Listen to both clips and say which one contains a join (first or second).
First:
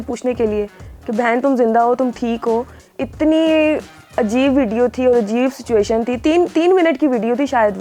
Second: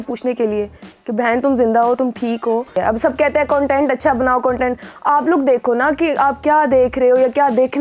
second